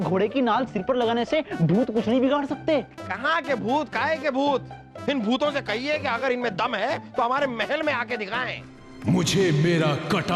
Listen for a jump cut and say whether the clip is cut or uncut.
cut